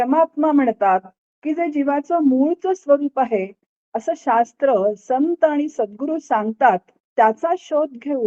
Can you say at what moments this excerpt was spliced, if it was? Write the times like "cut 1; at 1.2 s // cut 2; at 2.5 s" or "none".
cut 1; at 7.0 s